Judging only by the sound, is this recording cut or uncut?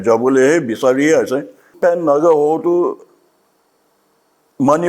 cut